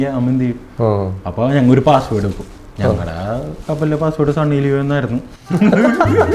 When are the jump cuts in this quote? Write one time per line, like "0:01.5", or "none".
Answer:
none